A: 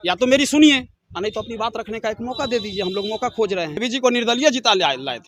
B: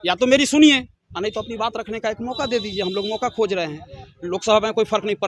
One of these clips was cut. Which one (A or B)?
A